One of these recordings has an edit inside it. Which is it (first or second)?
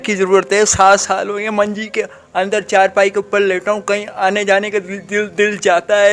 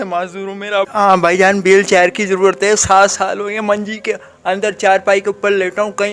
second